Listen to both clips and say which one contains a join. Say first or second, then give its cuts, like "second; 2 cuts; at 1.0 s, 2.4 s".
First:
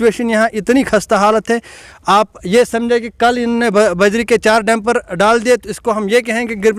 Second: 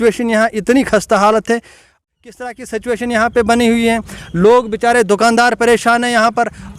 second; 1 cut; at 2.0 s